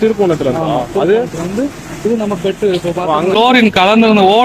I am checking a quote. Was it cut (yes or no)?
yes